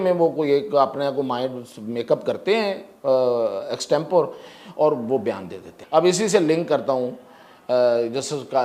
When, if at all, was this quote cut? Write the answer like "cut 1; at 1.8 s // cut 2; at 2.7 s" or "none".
cut 1; at 5.7 s